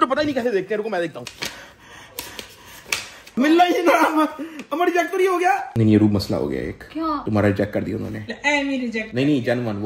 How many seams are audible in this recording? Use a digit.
3